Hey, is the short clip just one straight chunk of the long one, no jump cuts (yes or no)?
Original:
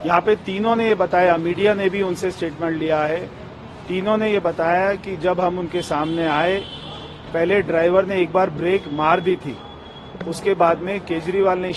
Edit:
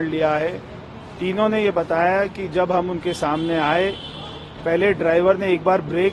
yes